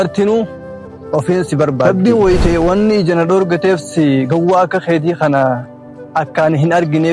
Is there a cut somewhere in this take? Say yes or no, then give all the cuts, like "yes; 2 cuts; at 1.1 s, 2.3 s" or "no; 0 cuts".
yes; 1 cut; at 1.9 s